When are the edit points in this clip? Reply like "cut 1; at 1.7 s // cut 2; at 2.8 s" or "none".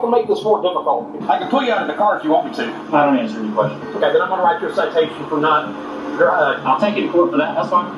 cut 1; at 1.2 s // cut 2; at 2.7 s // cut 3; at 6.6 s